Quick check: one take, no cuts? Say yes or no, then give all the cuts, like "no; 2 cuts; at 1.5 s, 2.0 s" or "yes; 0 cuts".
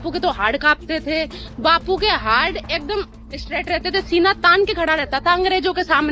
yes; 0 cuts